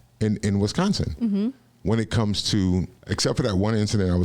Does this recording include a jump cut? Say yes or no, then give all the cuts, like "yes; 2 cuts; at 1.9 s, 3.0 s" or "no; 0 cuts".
yes; 1 cut; at 3.0 s